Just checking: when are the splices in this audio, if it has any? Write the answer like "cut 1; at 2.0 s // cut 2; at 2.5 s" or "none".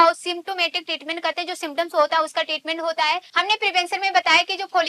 cut 1; at 3.3 s